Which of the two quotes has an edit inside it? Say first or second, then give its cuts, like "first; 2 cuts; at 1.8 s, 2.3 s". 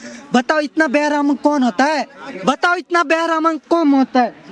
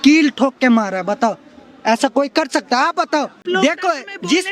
second; 1 cut; at 3.4 s